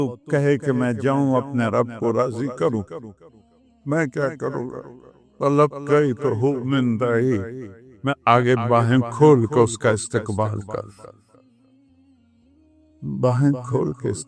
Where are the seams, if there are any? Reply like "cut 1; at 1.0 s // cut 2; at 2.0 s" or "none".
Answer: cut 1; at 11.1 s // cut 2; at 13.0 s

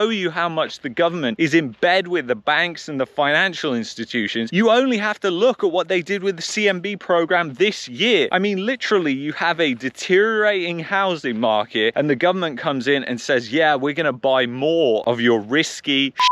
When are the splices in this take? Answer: none

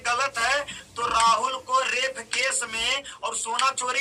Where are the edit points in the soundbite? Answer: none

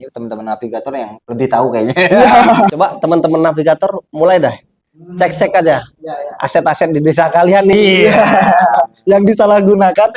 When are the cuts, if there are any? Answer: cut 1; at 2.7 s

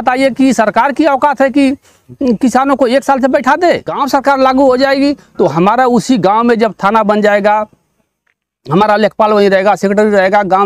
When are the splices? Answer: cut 1; at 3.9 s

